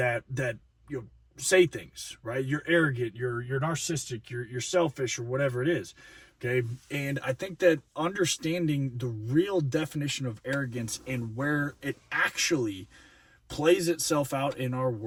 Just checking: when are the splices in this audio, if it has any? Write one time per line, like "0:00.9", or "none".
none